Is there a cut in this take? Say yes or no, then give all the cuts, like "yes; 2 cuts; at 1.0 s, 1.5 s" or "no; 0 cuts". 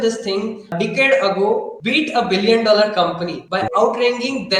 yes; 3 cuts; at 0.7 s, 1.8 s, 3.7 s